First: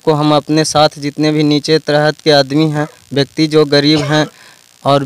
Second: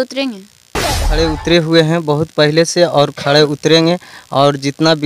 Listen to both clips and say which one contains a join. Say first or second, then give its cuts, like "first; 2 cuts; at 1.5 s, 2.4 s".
second; 1 cut; at 1.1 s